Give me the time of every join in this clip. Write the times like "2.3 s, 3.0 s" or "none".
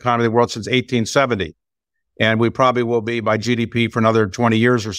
none